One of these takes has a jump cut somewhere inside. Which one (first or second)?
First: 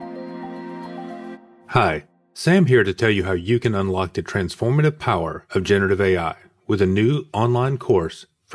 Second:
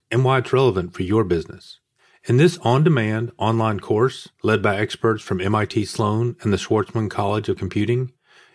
first